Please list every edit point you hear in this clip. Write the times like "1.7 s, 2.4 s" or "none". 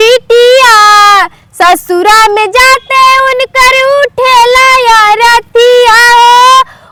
none